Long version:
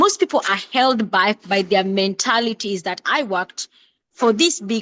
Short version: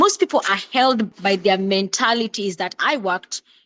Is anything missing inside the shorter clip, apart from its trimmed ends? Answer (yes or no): yes